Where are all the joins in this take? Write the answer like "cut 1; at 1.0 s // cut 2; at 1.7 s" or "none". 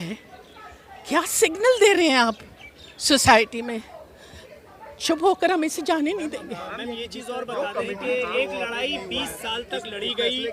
none